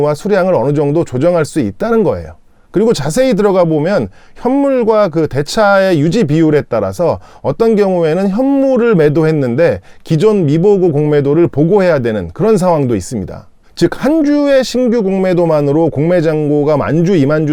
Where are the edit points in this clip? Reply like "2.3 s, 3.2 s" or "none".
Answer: none